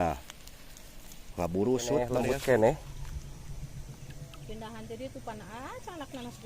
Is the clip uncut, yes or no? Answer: no